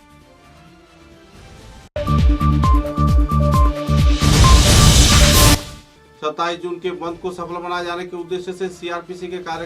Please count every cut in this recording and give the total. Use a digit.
2